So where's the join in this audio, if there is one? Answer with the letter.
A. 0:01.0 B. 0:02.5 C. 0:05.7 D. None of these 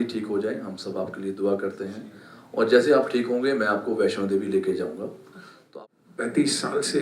C